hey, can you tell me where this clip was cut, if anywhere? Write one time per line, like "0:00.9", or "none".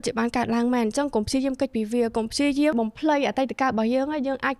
none